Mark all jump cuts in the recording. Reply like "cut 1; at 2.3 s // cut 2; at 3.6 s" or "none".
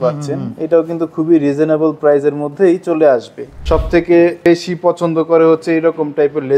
cut 1; at 3.6 s